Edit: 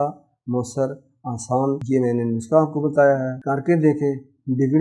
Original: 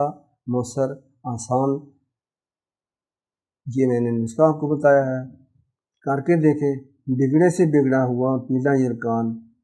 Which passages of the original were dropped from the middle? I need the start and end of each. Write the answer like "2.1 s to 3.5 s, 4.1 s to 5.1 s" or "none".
1.8 s to 3.7 s, 5.2 s to 5.9 s